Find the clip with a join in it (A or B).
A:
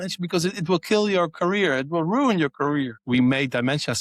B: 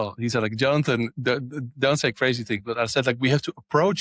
A